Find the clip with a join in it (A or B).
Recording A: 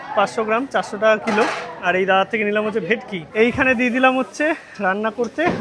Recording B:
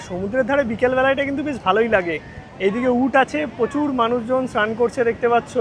A